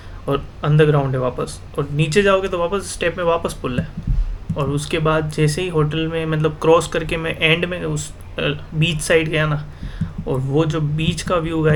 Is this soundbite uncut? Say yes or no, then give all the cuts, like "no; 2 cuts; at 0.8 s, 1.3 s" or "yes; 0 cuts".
yes; 0 cuts